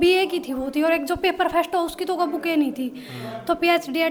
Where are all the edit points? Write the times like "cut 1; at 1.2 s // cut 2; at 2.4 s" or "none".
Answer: none